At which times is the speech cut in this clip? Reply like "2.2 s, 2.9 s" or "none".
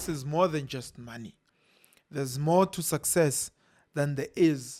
none